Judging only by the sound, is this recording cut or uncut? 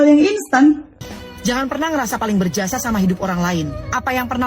cut